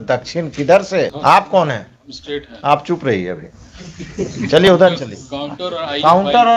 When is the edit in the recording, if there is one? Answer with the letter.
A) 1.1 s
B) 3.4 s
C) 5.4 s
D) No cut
A